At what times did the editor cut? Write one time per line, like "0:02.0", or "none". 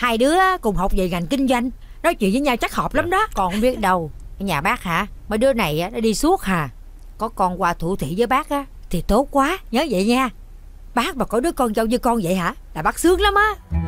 0:03.3